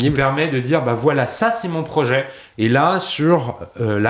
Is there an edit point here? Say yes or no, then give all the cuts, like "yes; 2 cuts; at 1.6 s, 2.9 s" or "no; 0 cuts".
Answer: yes; 1 cut; at 2.4 s